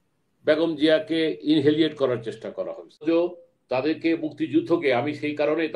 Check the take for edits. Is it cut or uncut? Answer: cut